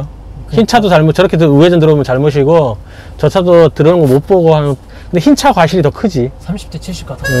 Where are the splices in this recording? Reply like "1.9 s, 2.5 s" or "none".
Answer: none